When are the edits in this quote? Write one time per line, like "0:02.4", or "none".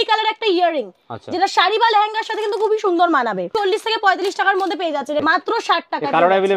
0:03.5
0:05.2

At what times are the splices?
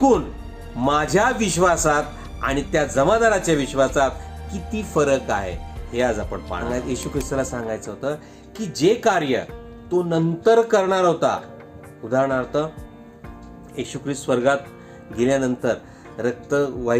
0:06.6

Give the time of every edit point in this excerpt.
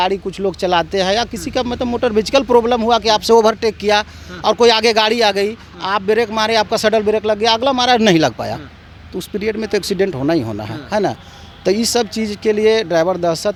none

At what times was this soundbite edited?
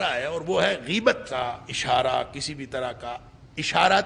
0:01.3

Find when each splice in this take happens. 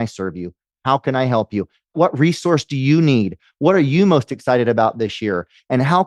0:01.9

